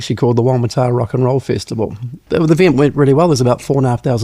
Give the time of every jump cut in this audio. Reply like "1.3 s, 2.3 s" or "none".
2.2 s